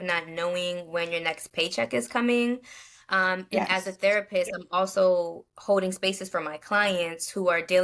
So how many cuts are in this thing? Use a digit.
0